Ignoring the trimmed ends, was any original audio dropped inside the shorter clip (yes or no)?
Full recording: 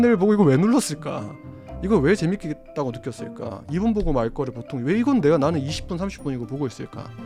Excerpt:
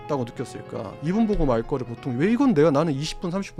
no